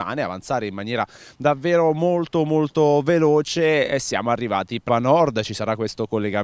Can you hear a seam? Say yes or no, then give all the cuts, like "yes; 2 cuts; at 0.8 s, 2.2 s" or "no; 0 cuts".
no; 0 cuts